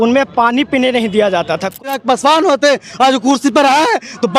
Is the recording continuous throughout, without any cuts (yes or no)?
no